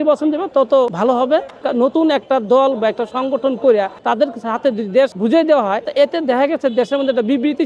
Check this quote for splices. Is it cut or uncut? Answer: cut